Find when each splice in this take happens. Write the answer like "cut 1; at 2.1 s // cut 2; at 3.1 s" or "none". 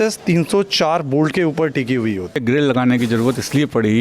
cut 1; at 2.4 s